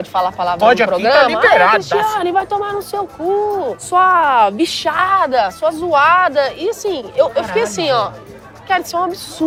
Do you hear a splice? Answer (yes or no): no